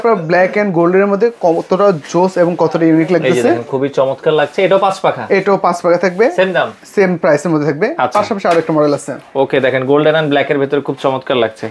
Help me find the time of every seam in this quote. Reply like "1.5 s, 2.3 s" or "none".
none

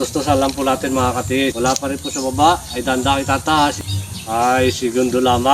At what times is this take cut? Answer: 1.5 s, 3.9 s

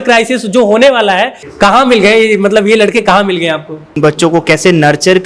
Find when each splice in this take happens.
1.4 s, 4.0 s

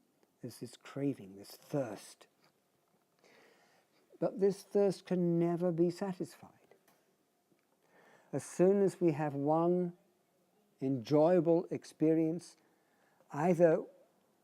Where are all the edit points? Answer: 11.0 s

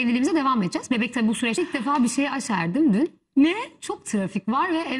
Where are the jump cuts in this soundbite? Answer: 1.6 s

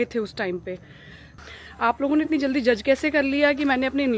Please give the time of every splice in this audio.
1.4 s

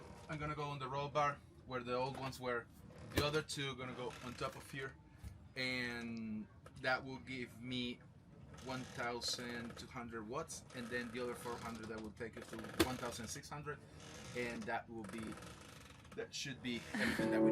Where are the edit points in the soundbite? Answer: none

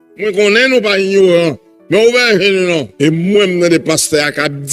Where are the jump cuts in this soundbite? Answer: 2.9 s

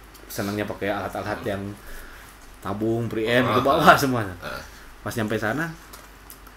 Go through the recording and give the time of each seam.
none

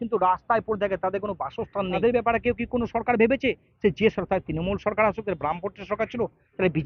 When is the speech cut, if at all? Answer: 2.0 s

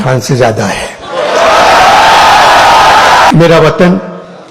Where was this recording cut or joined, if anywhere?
3.3 s

